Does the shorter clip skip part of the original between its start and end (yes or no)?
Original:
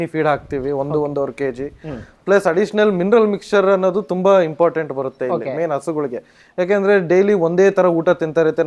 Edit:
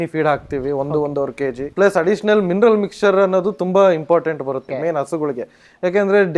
yes